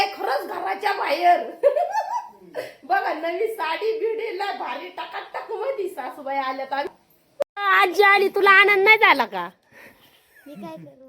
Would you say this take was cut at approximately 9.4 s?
no; 1 cut; at 7.4 s

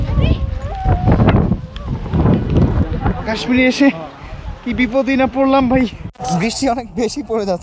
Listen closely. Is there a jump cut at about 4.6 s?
no; 1 cut; at 6.1 s

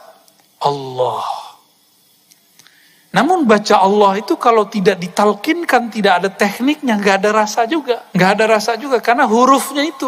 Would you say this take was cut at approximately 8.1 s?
yes; 1 cut; at 8.1 s

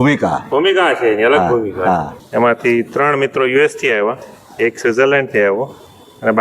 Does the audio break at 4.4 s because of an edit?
no; 1 cut; at 2.2 s

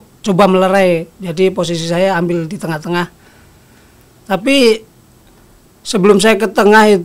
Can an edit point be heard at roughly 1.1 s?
no; 0 cuts

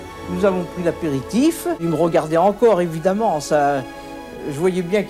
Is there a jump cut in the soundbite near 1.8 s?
yes; 1 cut; at 1.8 s

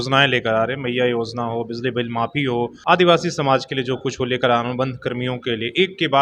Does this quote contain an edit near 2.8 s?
yes; 1 cut; at 2.8 s

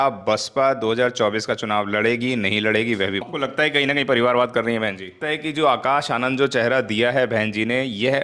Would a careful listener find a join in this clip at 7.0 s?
no; 2 cuts; at 3.2 s, 5.1 s

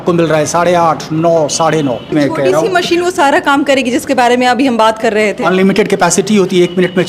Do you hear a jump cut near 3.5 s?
no; 1 cut; at 2.1 s

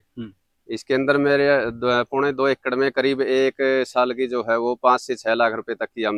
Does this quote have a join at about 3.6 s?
no; 0 cuts

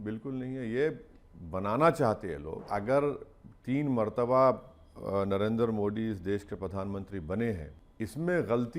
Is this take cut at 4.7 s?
no; 2 cuts; at 2.7 s, 7.8 s

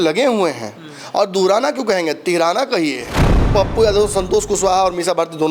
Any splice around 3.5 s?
yes; 1 cut; at 3.5 s

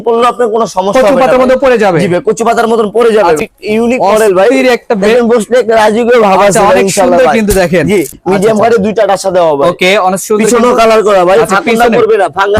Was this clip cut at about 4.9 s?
no; 2 cuts; at 3.4 s, 8.1 s

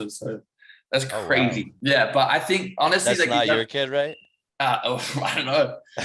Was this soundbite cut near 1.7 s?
yes; 1 cut; at 1.7 s

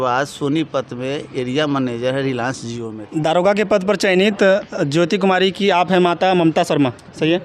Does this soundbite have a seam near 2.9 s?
yes; 1 cut; at 2.9 s

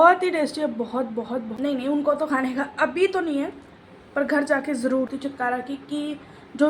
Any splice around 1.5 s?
yes; 2 cuts; at 1.5 s, 5.1 s

